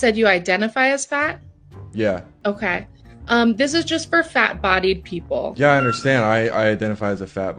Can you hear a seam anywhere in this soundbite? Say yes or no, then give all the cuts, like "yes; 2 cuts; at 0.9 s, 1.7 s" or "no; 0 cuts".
yes; 1 cut; at 2.3 s